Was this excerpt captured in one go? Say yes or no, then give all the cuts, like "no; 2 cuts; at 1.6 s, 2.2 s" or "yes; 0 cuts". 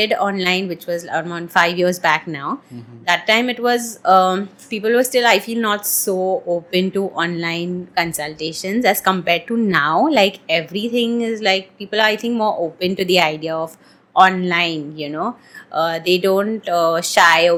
yes; 0 cuts